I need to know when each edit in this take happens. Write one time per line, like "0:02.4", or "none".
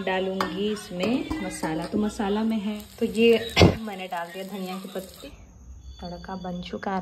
0:02.8
0:05.3